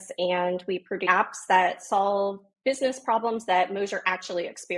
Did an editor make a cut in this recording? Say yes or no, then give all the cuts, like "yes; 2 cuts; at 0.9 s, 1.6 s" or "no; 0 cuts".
yes; 1 cut; at 1.0 s